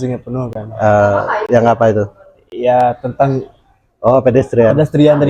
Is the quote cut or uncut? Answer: uncut